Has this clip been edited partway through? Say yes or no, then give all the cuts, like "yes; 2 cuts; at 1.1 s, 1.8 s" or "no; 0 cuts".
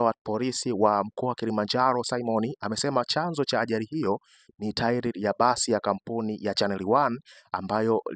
no; 0 cuts